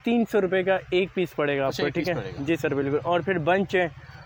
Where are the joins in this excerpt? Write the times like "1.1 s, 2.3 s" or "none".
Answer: none